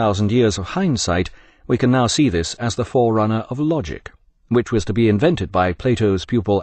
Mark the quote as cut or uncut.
uncut